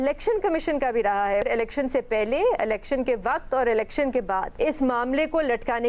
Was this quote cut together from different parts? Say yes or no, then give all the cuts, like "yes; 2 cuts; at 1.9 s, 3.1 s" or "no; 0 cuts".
yes; 2 cuts; at 1.4 s, 4.5 s